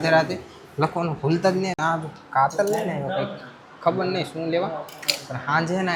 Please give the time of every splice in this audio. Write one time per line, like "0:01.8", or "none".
none